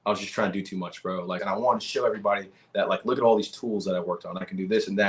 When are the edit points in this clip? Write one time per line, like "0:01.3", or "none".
0:01.4